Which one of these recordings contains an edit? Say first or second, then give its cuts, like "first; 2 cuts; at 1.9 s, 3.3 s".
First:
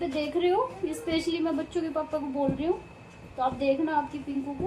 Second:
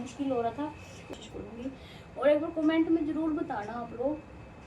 second; 1 cut; at 1.1 s